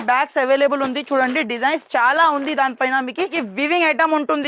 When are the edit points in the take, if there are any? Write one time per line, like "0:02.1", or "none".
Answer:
0:03.4